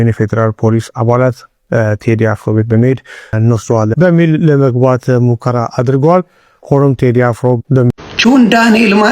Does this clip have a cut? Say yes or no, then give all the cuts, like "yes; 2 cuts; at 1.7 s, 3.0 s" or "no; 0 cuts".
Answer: yes; 2 cuts; at 3.3 s, 8.0 s